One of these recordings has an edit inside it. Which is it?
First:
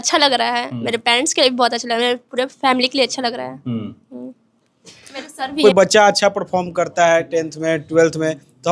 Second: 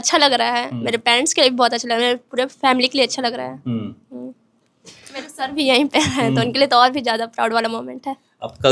first; 1 cut; at 5.6 s

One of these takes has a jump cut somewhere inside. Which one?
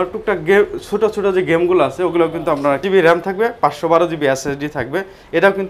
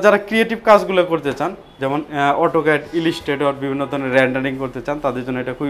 first; 1 cut; at 2.8 s

